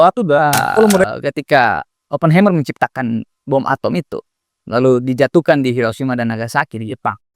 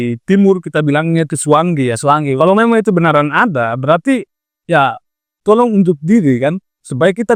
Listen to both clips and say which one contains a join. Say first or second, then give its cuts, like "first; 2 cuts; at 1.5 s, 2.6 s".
first; 1 cut; at 1.1 s